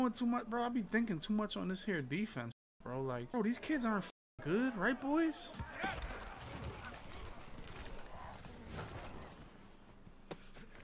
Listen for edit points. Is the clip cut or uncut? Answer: uncut